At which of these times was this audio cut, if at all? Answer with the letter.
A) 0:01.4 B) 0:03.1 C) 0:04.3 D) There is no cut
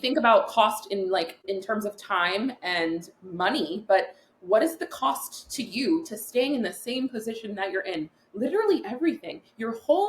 A